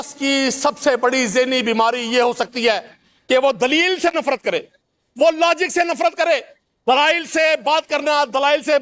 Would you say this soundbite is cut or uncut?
uncut